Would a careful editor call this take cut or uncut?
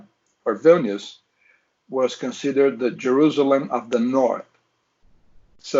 uncut